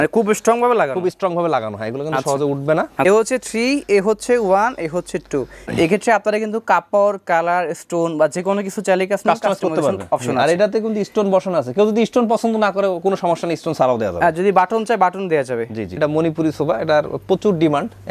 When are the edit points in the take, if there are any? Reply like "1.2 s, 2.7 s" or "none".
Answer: 3.1 s, 5.7 s, 16.0 s